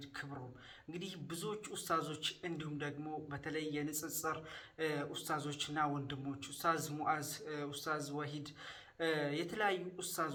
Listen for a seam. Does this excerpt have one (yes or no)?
no